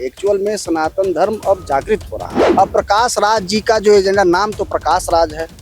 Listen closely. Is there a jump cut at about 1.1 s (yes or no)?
no